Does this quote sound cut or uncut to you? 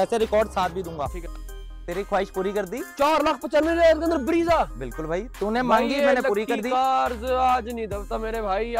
cut